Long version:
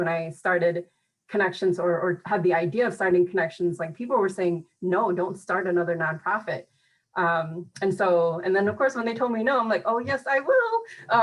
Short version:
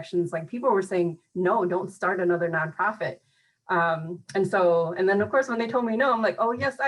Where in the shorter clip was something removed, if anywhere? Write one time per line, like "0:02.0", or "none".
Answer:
none